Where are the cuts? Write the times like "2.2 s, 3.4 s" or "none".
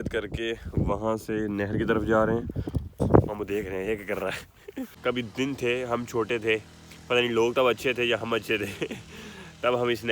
3.0 s, 4.9 s